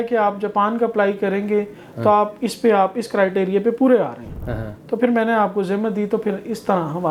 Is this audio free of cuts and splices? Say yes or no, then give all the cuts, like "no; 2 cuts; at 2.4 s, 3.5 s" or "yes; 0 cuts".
yes; 0 cuts